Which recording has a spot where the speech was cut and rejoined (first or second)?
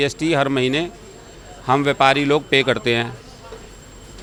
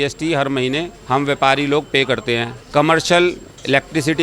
second